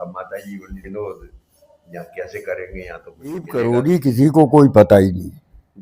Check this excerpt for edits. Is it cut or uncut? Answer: cut